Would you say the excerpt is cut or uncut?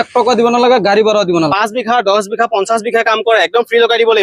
cut